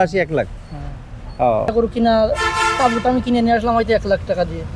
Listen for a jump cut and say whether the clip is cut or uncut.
cut